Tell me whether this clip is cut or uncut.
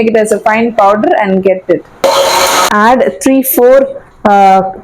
cut